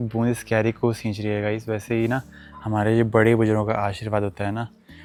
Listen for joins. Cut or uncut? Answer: uncut